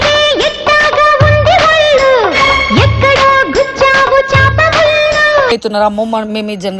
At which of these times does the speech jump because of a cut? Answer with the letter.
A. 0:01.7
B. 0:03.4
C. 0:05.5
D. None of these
C